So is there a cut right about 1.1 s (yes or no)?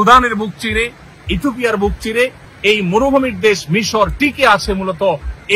no